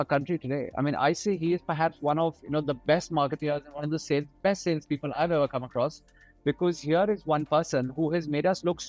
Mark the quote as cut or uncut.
uncut